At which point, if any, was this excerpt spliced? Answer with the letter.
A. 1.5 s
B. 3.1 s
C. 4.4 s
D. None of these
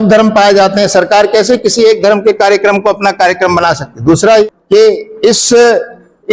C